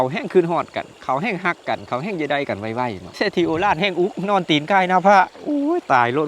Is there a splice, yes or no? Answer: yes